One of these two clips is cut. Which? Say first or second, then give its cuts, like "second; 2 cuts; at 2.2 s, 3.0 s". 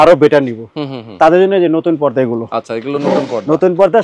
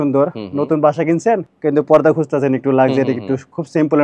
second; 1 cut; at 1.5 s